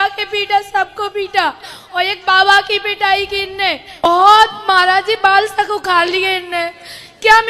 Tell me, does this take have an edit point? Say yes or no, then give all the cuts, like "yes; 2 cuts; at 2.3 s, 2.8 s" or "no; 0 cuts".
yes; 1 cut; at 4.0 s